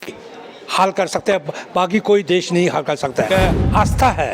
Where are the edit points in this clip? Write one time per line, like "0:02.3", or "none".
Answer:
0:03.3